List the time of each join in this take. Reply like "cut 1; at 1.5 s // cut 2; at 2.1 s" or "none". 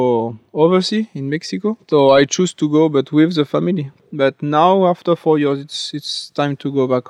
cut 1; at 3.9 s